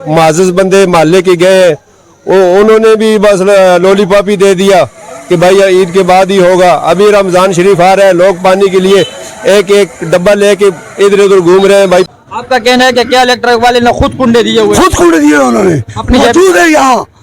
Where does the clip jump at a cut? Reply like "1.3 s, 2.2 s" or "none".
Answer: 12.1 s

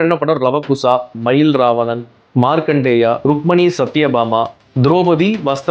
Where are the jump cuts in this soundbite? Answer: 1.1 s

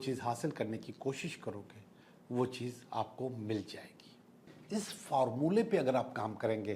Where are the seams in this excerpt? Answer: 4.5 s

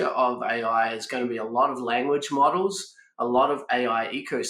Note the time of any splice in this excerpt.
none

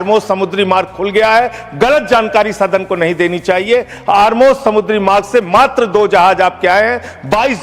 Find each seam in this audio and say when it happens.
none

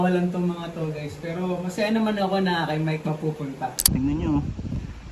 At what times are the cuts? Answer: 3.9 s

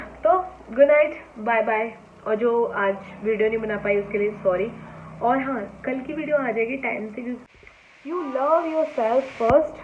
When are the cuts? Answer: 7.4 s

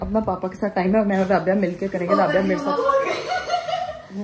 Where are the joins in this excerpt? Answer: none

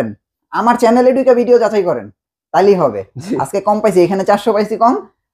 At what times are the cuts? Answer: none

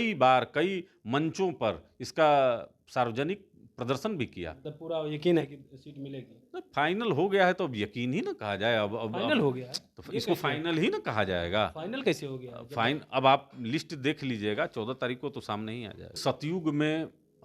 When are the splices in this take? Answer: 4.6 s, 16.2 s

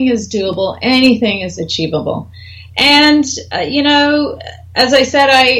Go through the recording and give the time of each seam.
none

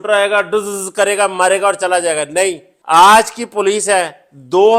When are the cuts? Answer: none

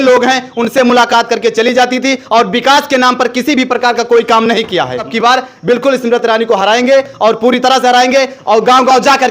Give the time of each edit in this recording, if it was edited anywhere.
5.1 s

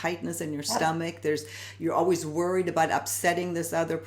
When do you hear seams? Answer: none

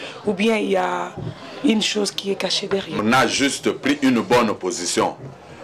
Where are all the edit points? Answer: 3.0 s

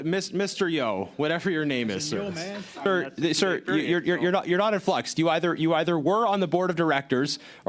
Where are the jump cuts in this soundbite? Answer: 2.8 s

